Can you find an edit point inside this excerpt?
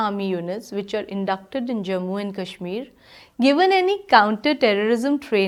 no; 0 cuts

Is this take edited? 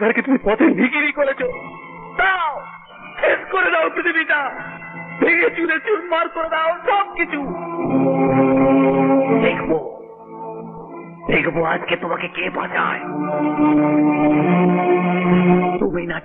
no; 0 cuts

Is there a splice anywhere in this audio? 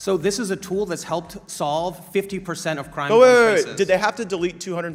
no; 0 cuts

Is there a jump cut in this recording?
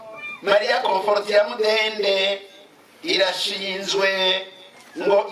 no; 0 cuts

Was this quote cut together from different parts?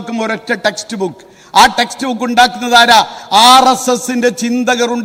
no; 0 cuts

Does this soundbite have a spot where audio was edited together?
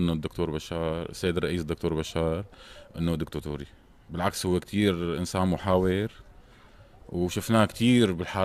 yes; 1 cut; at 4.3 s

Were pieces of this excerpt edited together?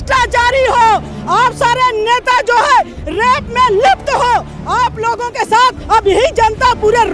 no; 0 cuts

